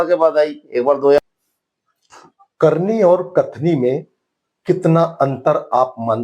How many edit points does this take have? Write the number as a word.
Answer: one